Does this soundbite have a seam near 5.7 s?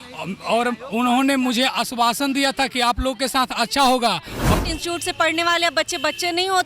no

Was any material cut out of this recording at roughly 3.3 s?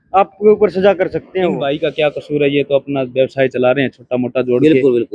no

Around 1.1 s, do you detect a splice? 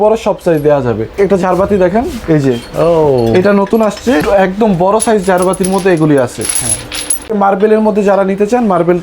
yes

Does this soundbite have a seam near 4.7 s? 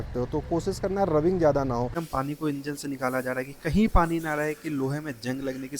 no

